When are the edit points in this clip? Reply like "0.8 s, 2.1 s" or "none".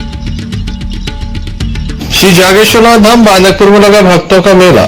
1.3 s